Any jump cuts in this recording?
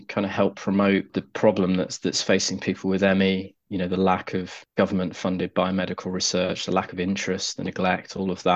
yes; 2 cuts; at 1.2 s, 4.6 s

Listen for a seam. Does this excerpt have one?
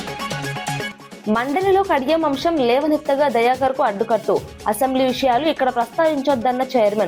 yes; 1 cut; at 0.9 s

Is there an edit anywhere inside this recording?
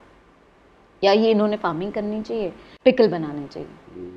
yes; 1 cut; at 2.6 s

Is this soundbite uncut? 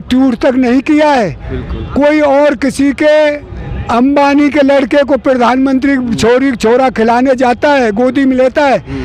yes; 0 cuts

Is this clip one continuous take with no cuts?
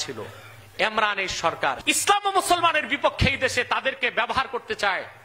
no; 1 cut; at 1.8 s

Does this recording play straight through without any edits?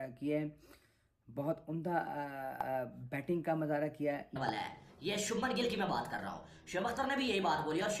no; 1 cut; at 4.4 s

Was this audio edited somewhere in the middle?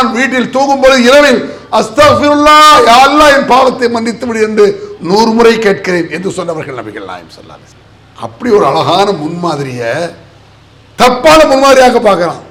no; 0 cuts

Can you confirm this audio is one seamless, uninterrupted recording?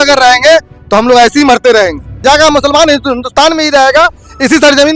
no; 1 cut; at 2.1 s

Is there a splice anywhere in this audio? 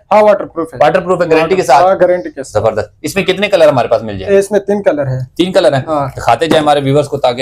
no; 0 cuts

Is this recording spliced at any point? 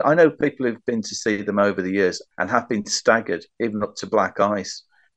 yes; 1 cut; at 2.2 s

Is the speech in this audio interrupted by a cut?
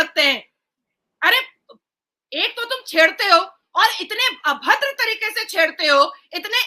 no; 0 cuts

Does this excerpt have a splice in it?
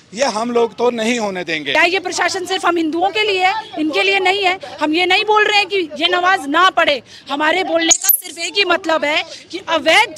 yes; 1 cut; at 1.7 s

